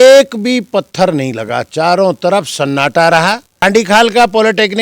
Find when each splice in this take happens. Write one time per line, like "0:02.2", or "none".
0:03.6